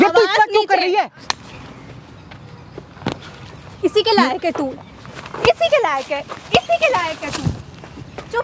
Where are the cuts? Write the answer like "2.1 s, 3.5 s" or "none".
1.0 s